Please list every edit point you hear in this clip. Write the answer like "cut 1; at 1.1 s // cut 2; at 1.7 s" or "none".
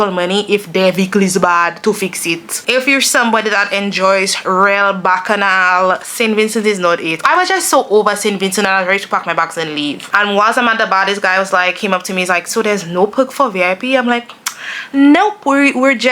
cut 1; at 2.5 s // cut 2; at 7.2 s // cut 3; at 10.0 s

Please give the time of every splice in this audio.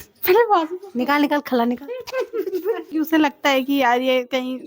cut 1; at 2.9 s

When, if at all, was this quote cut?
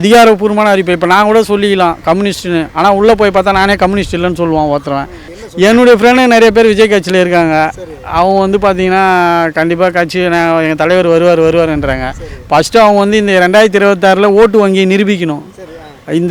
cut 1; at 5.2 s

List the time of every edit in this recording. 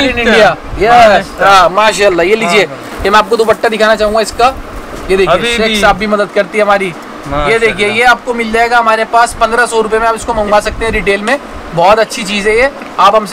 none

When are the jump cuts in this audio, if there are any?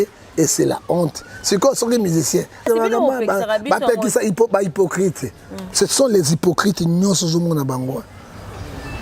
cut 1; at 2.6 s

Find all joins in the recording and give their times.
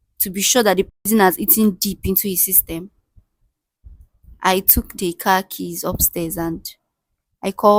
none

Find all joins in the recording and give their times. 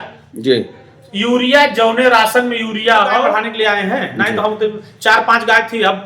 cut 1; at 3.4 s

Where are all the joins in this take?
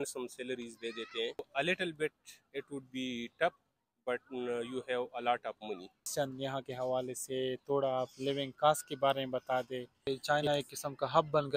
cut 1; at 1.5 s // cut 2; at 6.0 s // cut 3; at 10.1 s

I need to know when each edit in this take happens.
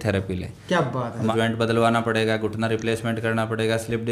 cut 1; at 1.3 s

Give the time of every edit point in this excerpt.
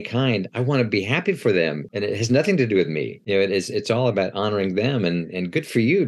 cut 1; at 1.9 s // cut 2; at 3.1 s

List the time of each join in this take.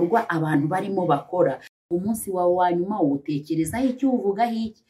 cut 1; at 1.9 s

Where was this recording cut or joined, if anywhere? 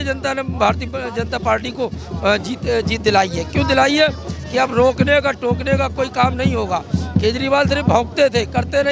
none

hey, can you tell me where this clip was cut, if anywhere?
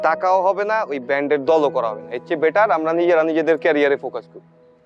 none

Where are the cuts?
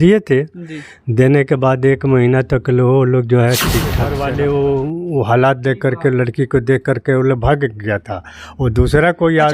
cut 1; at 4.1 s

